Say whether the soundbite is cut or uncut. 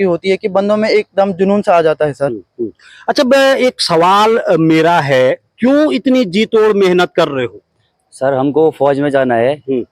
uncut